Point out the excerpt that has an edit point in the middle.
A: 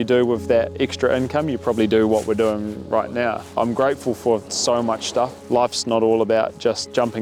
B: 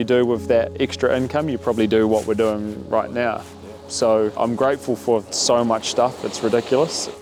A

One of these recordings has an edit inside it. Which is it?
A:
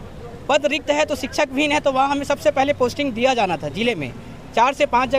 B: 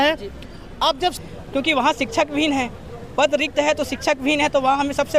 B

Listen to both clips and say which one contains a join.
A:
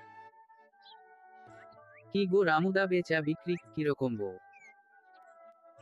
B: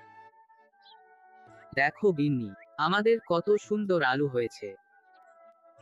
B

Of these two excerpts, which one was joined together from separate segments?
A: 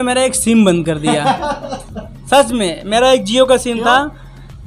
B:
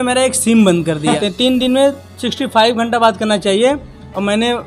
B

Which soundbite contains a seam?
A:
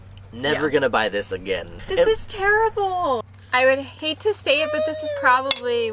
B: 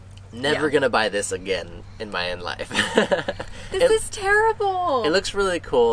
A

